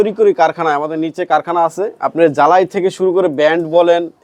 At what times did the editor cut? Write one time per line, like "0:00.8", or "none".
none